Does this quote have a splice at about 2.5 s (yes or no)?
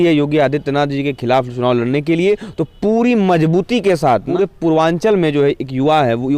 no